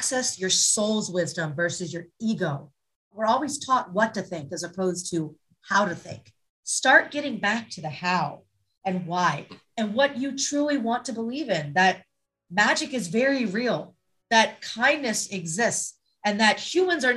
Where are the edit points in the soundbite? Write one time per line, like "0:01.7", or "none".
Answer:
0:03.1

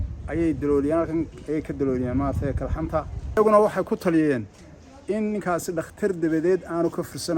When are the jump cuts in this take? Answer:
0:03.2

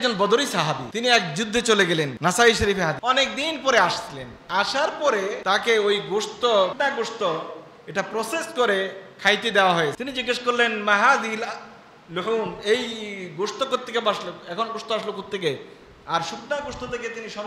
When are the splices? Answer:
0:00.9
0:02.1
0:03.0
0:05.4
0:06.7
0:10.0

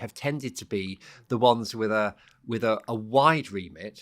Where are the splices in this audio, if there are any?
none

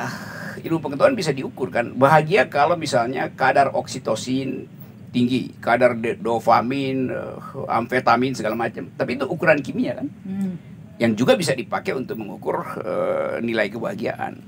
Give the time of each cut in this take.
none

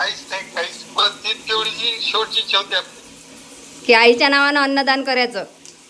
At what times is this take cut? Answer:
none

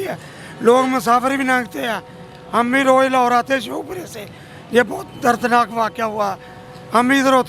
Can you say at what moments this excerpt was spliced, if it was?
none

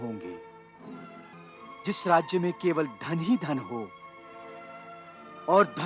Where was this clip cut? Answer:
0:01.3

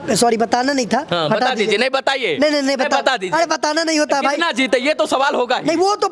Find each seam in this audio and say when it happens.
none

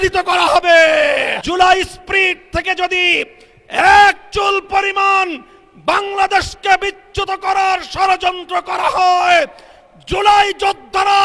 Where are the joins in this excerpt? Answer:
0:01.4

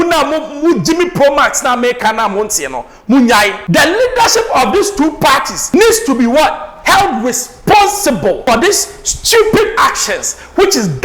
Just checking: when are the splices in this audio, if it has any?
0:03.6
0:05.6
0:06.7
0:08.4

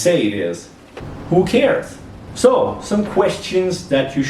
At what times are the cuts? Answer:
0:01.1

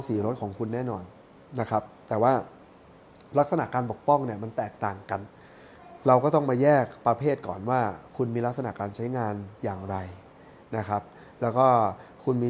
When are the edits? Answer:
none

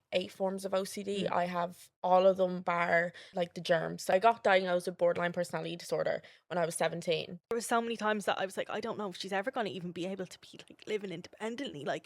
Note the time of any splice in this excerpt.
0:03.5
0:07.5

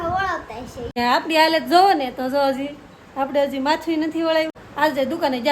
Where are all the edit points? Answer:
0:01.0
0:04.6

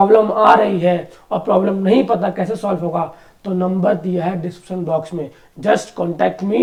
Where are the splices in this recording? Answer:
none

